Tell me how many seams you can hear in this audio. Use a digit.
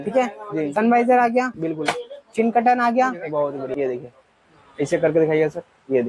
1